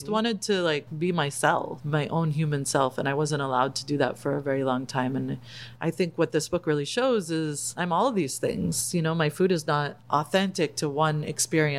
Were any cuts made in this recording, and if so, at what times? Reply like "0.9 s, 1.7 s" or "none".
0.9 s, 1.8 s, 7.7 s, 10.0 s